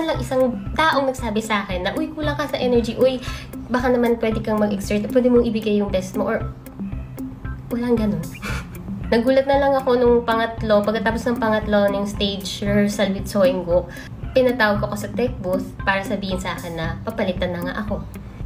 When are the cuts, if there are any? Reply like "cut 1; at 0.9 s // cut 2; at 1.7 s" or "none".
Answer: none